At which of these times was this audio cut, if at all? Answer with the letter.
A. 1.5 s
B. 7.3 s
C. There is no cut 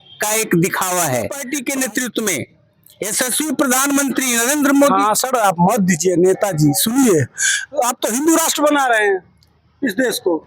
A